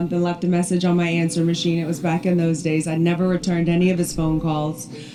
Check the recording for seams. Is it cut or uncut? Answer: uncut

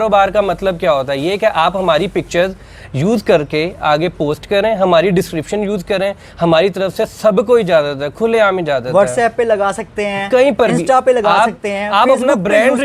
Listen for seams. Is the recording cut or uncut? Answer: uncut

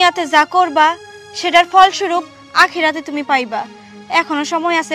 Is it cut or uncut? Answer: uncut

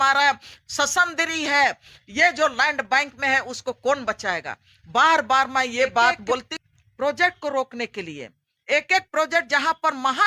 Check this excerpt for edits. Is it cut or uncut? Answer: cut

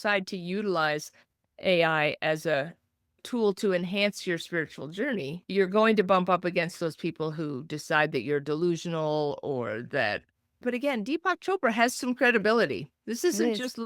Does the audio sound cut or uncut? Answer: uncut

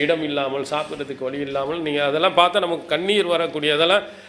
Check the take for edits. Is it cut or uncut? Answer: uncut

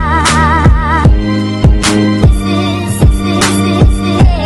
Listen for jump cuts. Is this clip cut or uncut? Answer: uncut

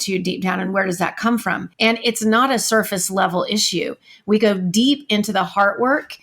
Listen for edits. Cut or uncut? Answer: cut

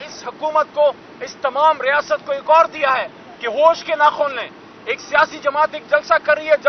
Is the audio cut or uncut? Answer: uncut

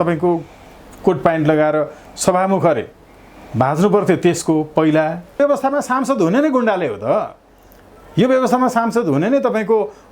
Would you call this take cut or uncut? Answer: cut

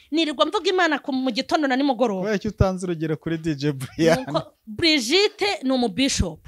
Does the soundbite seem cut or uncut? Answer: cut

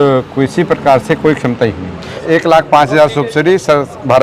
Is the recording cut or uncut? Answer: cut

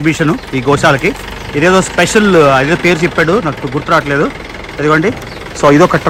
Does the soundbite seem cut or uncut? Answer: uncut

